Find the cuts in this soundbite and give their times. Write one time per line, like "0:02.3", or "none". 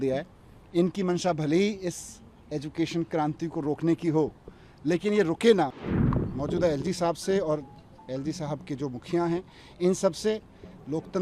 0:06.0